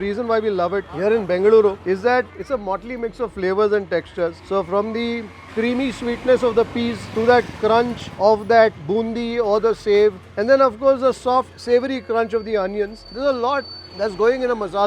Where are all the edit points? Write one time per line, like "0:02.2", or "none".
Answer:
0:00.9
0:02.2
0:13.1
0:13.8